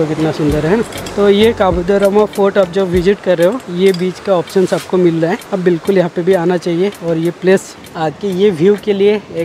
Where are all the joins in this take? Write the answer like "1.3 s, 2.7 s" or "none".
7.8 s